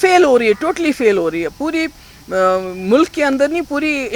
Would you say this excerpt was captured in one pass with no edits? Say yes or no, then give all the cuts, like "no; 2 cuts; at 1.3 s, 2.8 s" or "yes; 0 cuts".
yes; 0 cuts